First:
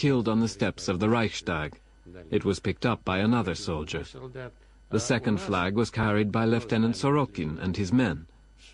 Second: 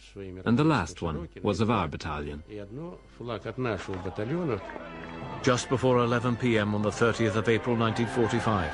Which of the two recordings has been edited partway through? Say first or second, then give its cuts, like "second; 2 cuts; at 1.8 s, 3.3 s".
second; 1 cut; at 3.7 s